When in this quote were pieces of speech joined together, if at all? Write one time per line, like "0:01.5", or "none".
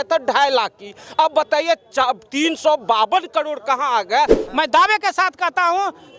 0:04.4